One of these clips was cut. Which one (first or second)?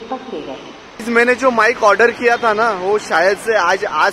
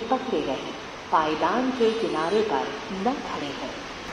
first